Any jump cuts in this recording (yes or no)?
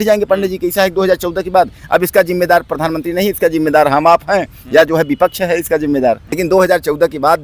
yes